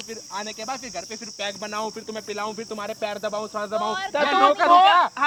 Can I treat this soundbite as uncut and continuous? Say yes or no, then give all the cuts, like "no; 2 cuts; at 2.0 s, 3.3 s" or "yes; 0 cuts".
yes; 0 cuts